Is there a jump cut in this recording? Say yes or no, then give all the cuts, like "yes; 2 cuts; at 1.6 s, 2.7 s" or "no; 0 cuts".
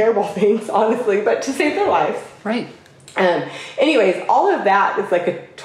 no; 0 cuts